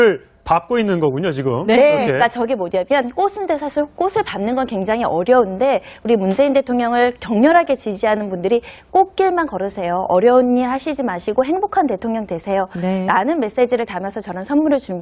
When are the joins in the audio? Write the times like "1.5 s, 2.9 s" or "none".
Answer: 11.5 s